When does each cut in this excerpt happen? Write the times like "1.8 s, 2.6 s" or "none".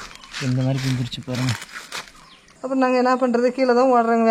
2.5 s